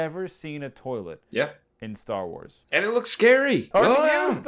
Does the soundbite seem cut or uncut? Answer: cut